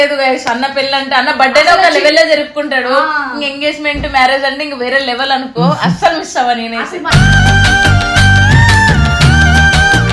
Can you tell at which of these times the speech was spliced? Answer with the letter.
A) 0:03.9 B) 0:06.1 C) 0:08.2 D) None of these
D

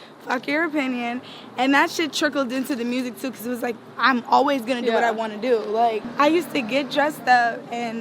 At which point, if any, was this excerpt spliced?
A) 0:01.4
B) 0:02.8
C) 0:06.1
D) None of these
C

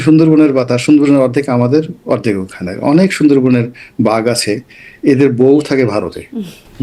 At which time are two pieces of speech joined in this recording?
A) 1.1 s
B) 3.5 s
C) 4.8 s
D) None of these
D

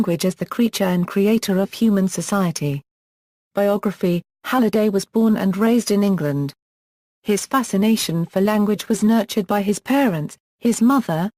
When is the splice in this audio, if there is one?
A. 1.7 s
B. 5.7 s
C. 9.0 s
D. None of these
B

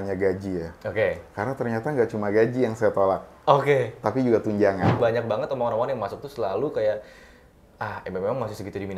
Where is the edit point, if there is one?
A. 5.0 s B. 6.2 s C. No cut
A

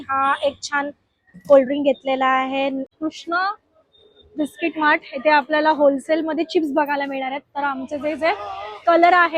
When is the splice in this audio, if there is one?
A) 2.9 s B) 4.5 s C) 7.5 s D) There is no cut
A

